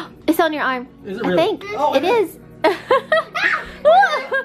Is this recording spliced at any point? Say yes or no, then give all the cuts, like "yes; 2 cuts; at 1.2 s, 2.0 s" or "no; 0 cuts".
no; 0 cuts